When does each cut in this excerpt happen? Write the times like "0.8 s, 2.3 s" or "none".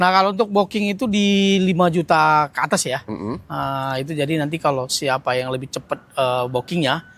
none